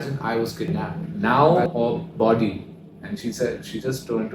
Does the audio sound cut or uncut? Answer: cut